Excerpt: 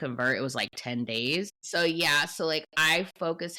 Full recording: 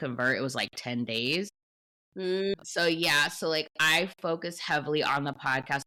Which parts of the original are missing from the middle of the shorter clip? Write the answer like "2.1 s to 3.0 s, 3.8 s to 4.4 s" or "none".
1.6 s to 2.7 s